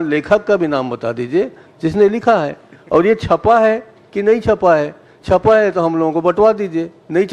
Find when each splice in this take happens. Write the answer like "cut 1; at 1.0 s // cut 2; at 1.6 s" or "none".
none